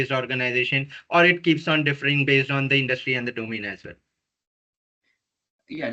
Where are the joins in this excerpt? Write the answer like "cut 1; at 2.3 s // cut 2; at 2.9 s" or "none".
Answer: none